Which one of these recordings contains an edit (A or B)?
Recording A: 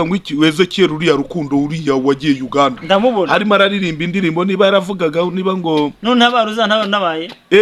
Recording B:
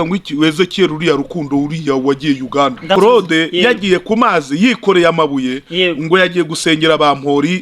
B